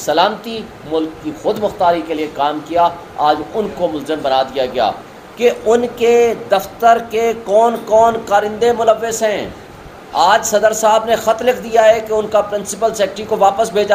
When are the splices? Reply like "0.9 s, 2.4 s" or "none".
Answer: 5.1 s

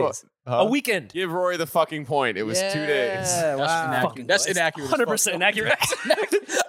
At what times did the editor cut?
1.1 s

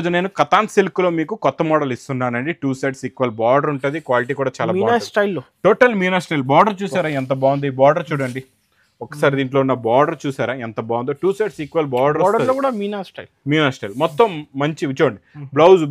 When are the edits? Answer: none

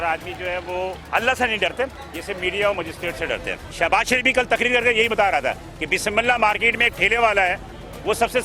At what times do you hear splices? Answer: 1.0 s, 2.1 s, 3.6 s

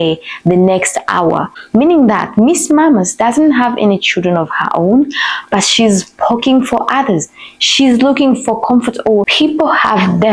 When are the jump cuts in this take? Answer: 1.6 s, 9.3 s

